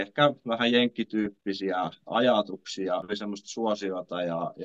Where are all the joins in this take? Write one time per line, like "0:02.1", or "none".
0:03.1